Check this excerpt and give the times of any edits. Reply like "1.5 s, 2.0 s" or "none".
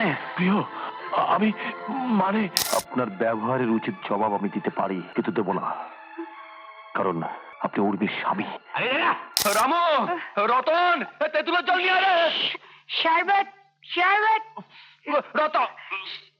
2.6 s, 5.1 s, 7.5 s, 9.4 s